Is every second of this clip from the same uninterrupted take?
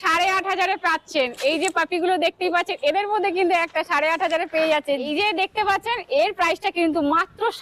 yes; 0 cuts

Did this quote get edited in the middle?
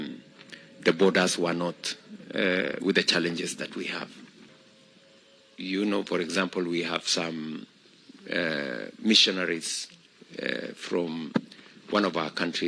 yes; 1 cut; at 4.4 s

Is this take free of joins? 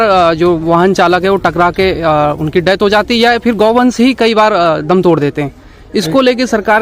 yes; 0 cuts

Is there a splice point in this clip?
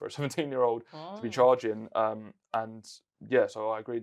no; 0 cuts

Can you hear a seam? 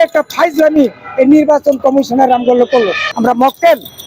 yes; 1 cut; at 3.0 s

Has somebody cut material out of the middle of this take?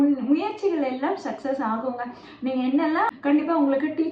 yes; 1 cut; at 3.1 s

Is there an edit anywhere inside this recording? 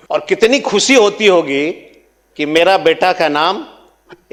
no; 0 cuts

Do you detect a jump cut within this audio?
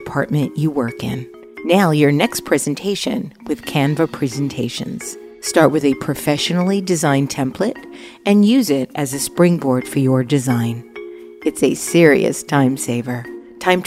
no; 0 cuts

